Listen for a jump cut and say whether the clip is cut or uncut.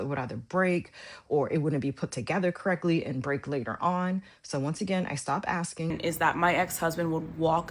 cut